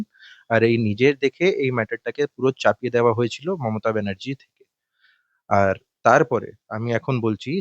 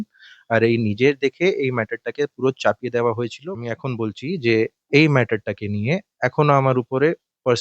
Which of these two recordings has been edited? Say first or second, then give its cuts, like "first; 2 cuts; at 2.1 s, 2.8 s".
second; 1 cut; at 3.5 s